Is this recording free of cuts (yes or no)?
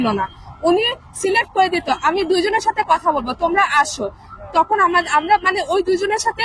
yes